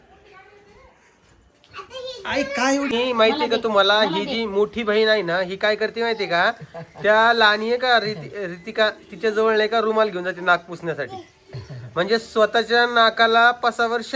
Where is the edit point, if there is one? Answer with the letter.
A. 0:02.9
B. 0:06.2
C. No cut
A